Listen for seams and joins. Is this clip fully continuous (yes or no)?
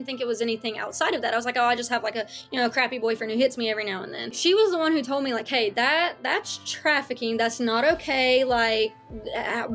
no